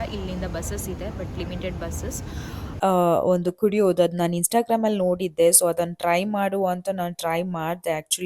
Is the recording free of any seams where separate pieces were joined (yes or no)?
no